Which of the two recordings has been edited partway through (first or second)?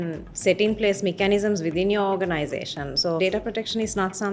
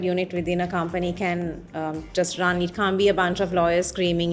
first